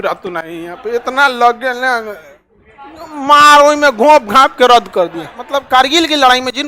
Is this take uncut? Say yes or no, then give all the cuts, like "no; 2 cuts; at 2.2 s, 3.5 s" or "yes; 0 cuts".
no; 1 cut; at 5.4 s